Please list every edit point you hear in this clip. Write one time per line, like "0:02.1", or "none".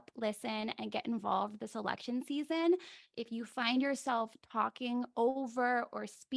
0:03.0